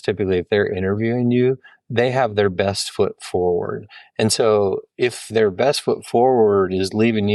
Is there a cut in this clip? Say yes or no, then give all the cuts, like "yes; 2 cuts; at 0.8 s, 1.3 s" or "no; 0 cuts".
no; 0 cuts